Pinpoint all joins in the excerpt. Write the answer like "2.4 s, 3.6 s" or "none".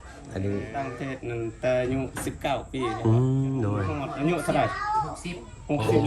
1.0 s, 4.0 s